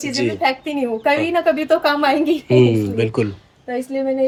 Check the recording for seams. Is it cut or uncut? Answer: uncut